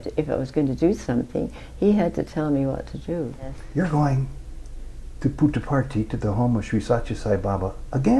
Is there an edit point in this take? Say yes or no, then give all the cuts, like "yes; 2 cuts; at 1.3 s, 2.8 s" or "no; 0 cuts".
yes; 1 cut; at 3.6 s